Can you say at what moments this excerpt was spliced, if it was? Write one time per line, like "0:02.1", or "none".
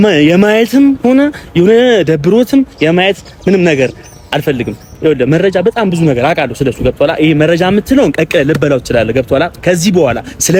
none